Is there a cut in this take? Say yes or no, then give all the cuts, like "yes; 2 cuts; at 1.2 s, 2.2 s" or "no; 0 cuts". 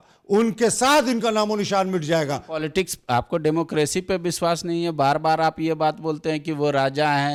no; 0 cuts